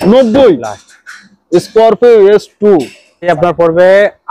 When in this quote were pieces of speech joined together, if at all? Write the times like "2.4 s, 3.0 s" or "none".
3.3 s